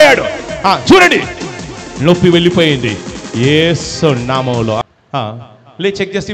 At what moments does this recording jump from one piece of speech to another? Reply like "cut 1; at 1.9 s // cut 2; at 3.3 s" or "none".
cut 1; at 4.8 s